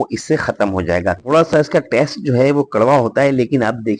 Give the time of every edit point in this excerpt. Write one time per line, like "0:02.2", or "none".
0:01.2